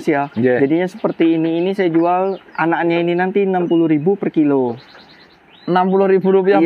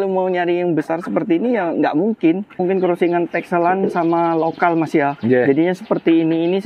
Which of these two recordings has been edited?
second; 1 cut; at 2.6 s

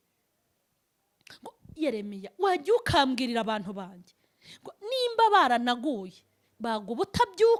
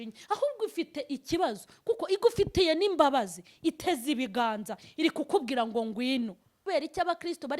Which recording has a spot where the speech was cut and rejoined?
second; 1 cut; at 6.7 s

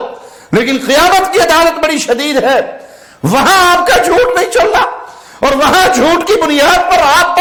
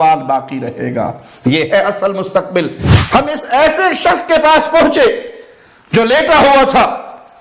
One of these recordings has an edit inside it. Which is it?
second; 1 cut; at 2.8 s

